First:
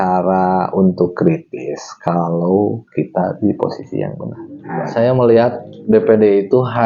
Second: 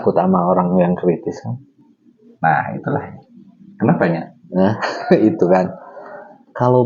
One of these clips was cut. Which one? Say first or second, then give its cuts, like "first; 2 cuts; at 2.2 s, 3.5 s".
first; 1 cut; at 4.6 s